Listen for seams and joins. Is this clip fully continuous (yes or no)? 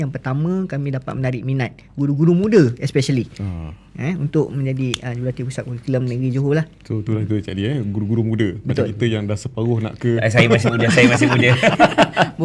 yes